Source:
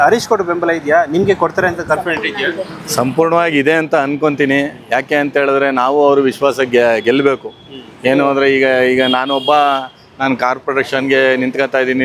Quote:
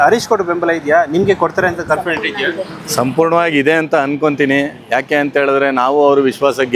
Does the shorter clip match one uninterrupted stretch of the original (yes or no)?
yes